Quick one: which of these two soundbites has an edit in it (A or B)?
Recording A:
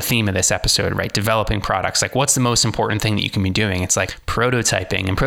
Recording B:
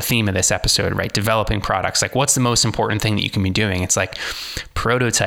A